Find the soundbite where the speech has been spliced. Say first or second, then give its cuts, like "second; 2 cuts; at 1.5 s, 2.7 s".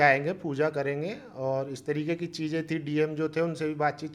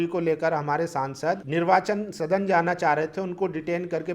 second; 1 cut; at 1.4 s